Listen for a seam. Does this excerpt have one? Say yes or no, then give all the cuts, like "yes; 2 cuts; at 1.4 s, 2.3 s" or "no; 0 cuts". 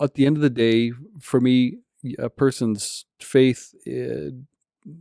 no; 0 cuts